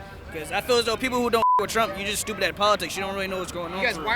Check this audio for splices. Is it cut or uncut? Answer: uncut